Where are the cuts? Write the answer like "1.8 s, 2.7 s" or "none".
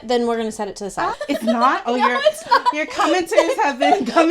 1.1 s